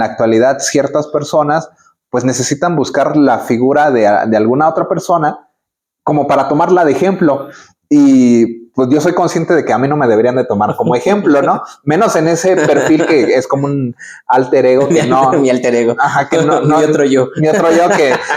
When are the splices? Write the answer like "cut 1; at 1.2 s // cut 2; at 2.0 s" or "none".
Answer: none